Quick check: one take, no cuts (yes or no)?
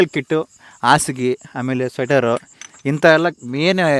yes